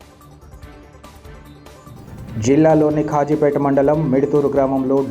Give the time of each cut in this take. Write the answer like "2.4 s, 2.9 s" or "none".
1.4 s